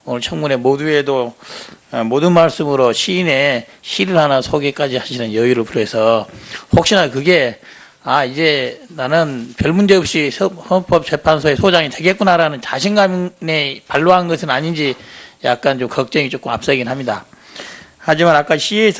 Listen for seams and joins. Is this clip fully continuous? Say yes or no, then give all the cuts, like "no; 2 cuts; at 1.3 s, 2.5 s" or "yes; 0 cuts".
no; 1 cut; at 5.2 s